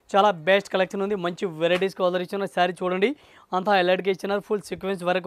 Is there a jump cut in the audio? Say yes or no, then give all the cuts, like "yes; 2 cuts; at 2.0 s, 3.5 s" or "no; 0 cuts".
no; 0 cuts